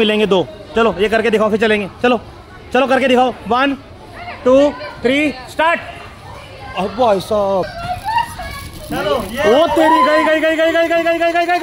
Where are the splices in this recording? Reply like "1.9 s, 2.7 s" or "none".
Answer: 7.8 s